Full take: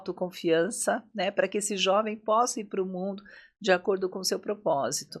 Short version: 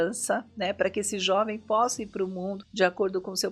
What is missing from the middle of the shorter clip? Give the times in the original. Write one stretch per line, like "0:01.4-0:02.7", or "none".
0:03.2-0:03.5